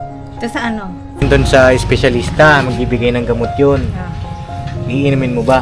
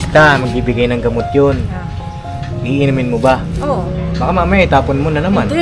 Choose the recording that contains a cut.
first; 1 cut; at 1.2 s

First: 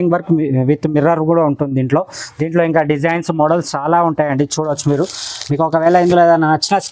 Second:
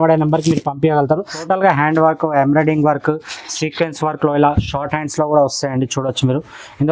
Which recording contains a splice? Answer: second; 1 cut; at 1.3 s

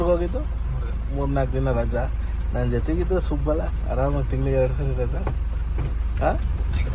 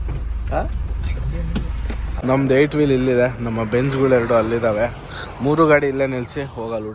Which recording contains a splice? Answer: second; 1 cut; at 2.2 s

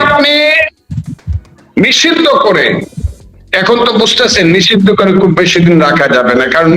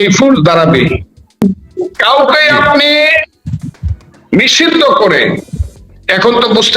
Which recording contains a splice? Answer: second; 1 cut; at 1.4 s

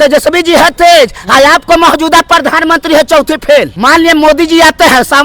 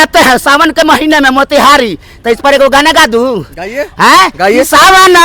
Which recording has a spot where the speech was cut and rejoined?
first; 1 cut; at 3.7 s

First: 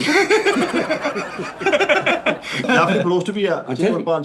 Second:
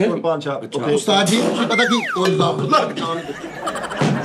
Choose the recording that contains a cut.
first; 1 cut; at 2.6 s

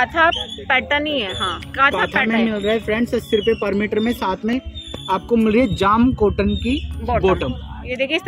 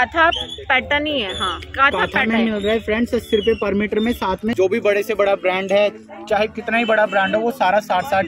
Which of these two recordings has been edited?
second; 1 cut; at 4.5 s

